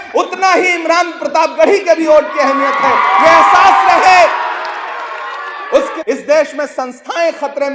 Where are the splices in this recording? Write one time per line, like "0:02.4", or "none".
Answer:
0:06.0